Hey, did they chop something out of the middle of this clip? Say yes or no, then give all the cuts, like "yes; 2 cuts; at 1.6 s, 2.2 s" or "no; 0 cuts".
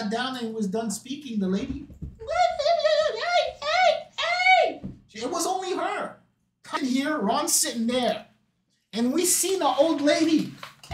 yes; 1 cut; at 6.8 s